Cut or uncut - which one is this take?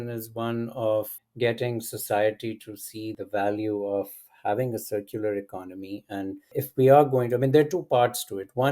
cut